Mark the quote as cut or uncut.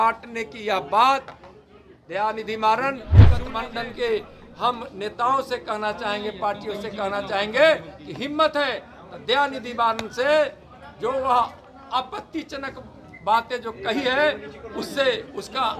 cut